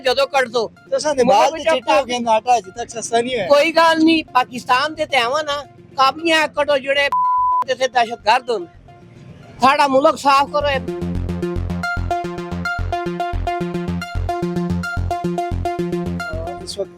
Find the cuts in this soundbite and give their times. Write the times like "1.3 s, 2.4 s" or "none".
none